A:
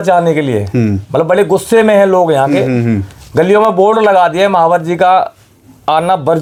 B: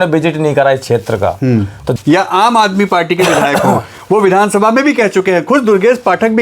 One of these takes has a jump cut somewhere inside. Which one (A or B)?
B